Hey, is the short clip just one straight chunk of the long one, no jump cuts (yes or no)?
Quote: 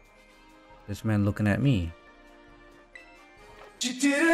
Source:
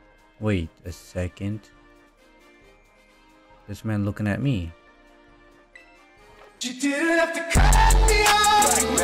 yes